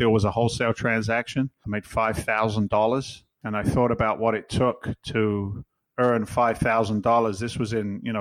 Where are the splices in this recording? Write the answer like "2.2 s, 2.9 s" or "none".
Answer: 1.6 s